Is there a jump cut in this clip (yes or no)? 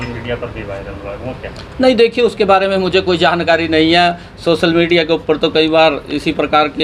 no